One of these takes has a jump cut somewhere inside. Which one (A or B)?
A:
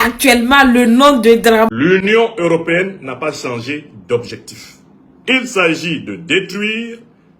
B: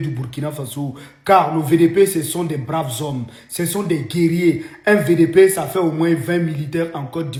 A